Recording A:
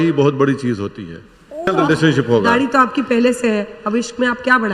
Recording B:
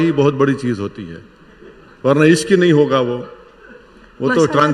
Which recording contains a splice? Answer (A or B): A